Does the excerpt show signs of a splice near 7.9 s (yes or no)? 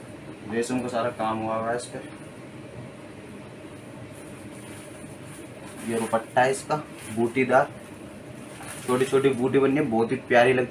no